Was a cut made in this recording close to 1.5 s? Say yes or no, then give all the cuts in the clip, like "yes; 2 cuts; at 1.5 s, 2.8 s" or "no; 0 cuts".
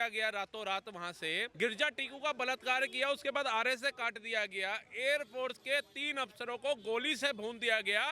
yes; 1 cut; at 1.5 s